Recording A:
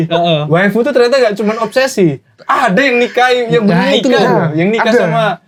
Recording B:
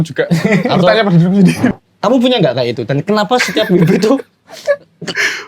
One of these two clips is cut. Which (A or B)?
B